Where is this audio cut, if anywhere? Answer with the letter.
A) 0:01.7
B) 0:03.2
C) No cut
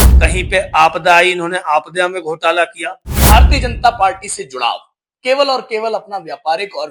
B